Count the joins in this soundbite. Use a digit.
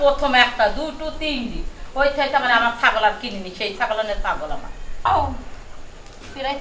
1